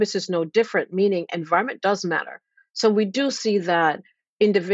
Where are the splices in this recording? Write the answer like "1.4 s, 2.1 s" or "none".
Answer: none

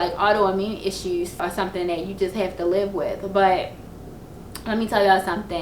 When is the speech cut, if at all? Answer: 1.4 s

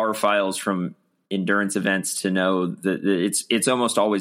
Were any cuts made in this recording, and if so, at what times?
none

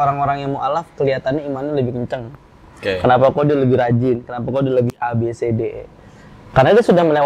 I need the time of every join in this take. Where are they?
none

